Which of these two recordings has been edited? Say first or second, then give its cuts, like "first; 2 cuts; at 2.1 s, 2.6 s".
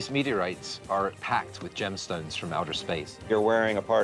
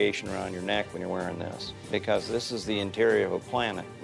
first; 2 cuts; at 1.2 s, 3.3 s